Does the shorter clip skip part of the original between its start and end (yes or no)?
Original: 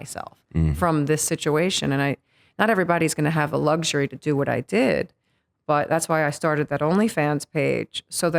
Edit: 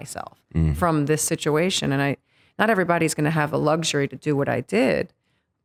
no